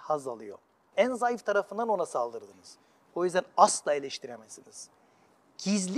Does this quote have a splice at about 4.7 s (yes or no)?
no